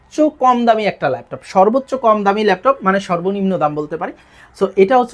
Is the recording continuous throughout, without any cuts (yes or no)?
yes